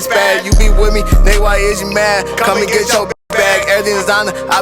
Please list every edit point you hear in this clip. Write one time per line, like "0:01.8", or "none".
none